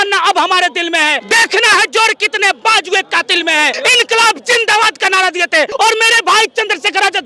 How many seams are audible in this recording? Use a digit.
3